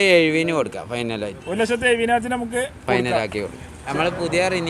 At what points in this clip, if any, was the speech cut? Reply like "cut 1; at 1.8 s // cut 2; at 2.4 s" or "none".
cut 1; at 3.8 s